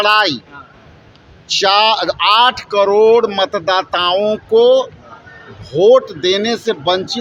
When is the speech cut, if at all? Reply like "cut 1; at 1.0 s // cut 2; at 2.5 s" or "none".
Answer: none